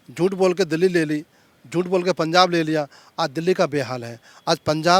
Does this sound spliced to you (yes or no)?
no